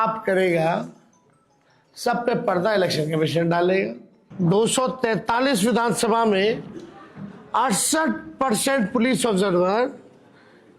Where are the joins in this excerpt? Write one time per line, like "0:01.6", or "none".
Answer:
0:04.2